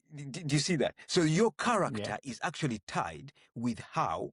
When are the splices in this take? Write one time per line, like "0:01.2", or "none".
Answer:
none